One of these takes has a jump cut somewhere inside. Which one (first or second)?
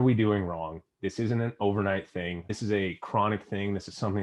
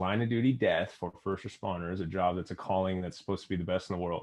first